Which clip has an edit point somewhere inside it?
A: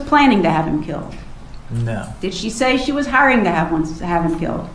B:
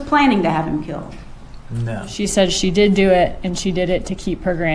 B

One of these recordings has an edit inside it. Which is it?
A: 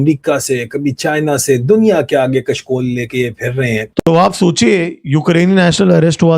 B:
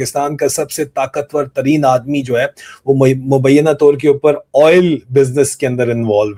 A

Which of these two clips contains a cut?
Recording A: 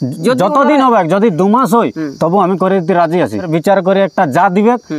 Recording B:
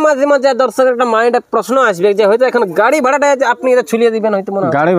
A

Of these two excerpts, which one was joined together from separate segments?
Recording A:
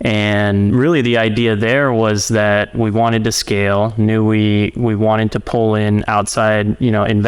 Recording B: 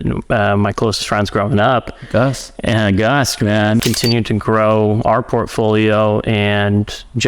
B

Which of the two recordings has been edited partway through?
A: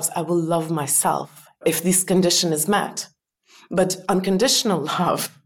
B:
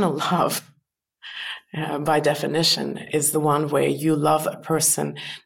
A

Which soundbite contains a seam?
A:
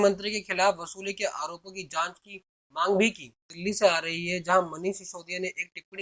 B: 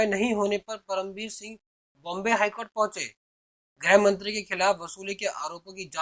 A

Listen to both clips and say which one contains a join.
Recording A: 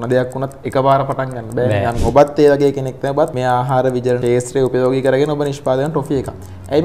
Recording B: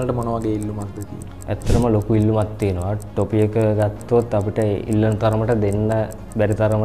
A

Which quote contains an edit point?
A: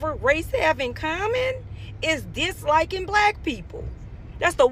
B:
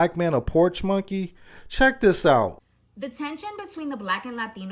B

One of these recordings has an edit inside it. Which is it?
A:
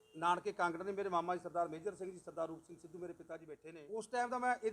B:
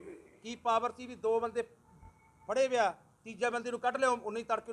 A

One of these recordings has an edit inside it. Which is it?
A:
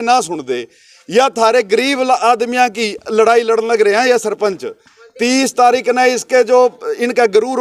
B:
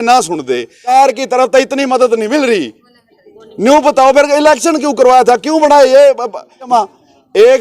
B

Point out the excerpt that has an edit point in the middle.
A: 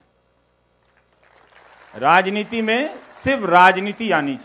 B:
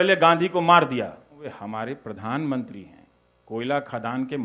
B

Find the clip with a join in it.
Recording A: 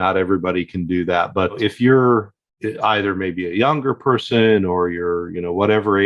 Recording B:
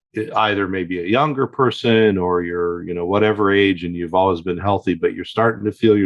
A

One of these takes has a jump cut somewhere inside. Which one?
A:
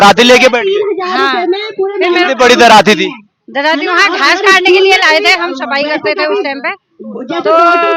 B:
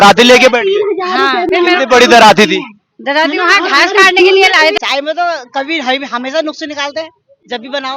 B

